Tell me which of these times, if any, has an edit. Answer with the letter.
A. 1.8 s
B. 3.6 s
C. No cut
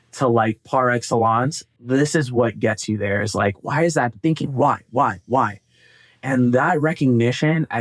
A